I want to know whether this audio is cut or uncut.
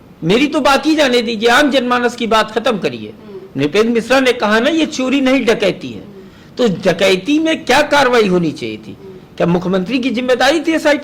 uncut